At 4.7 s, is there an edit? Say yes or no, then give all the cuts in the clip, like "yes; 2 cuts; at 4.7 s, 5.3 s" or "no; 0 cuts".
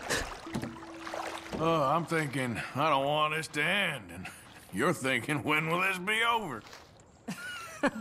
no; 0 cuts